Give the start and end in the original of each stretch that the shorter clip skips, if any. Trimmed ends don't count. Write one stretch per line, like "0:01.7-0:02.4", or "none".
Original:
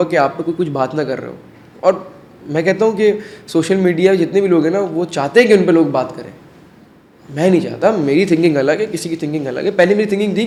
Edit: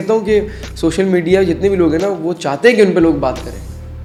none

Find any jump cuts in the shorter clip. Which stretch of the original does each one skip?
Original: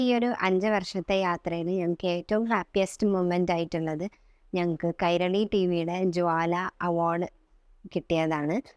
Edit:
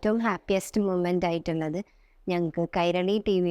none

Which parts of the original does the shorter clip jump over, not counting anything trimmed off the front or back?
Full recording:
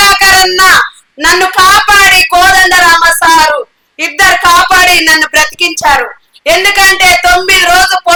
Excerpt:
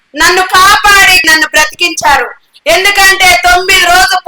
0:02.2-0:05.0

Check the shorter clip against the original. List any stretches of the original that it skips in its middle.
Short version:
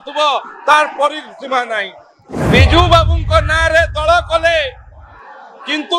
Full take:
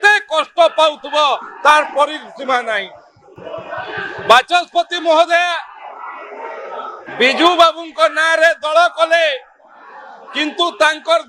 0:03.3-0:07.0

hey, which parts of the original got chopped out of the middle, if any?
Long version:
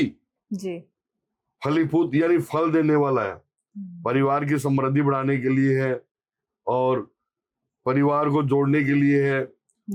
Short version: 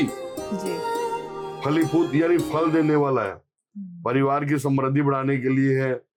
none

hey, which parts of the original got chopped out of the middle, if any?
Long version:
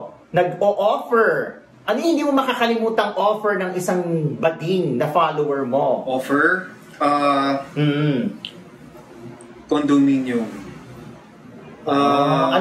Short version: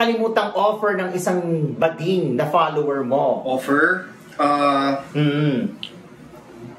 none

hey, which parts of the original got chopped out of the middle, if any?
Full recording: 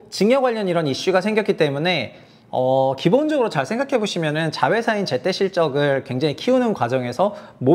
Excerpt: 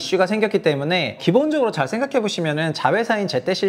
0:02.1-0:03.0

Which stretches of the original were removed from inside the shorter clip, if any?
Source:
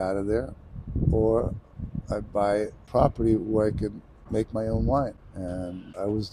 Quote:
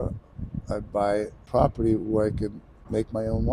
none

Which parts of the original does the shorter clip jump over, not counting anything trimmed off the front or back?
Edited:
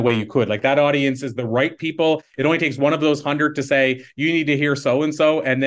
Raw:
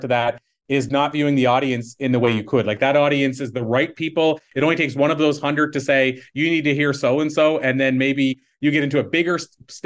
none

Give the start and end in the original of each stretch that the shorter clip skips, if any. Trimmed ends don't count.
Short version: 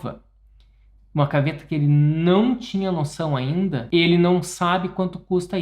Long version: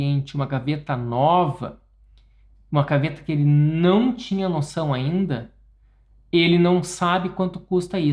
0:05.4-0:06.2

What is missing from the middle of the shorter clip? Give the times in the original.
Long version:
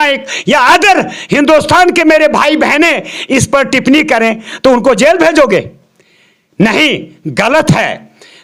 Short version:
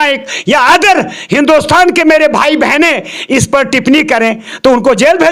none

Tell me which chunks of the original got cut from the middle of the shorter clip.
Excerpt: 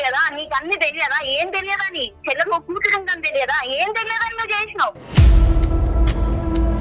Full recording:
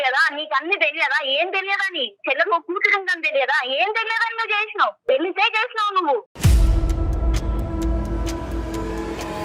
0:05.0-0:06.3

